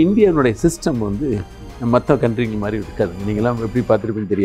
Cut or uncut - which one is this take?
uncut